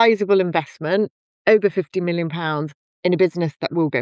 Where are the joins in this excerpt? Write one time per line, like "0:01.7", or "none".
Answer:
none